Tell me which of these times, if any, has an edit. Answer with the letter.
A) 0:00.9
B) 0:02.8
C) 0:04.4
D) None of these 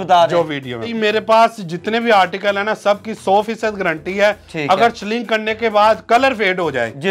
A